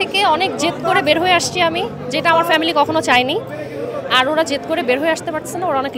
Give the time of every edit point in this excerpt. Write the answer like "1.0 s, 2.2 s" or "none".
none